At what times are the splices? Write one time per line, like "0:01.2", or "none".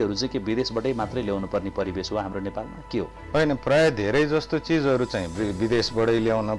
0:03.2